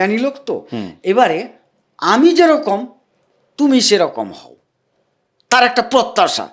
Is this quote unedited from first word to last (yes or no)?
yes